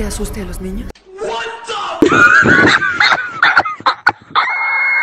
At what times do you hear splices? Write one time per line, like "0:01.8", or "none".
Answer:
none